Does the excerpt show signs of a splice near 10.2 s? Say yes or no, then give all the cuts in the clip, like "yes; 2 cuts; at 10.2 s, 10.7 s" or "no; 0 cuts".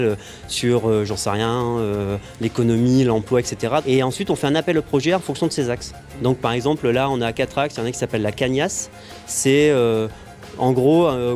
yes; 1 cut; at 10.2 s